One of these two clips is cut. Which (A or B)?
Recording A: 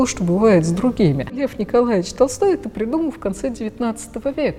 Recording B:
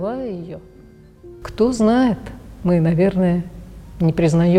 A